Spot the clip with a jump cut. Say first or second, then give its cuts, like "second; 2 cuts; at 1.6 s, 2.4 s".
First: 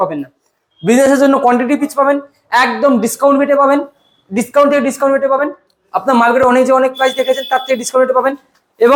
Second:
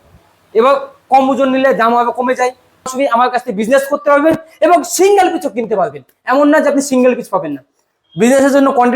second; 1 cut; at 2.9 s